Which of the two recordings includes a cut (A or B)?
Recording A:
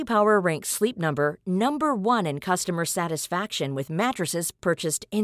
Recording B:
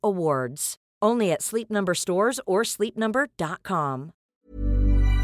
B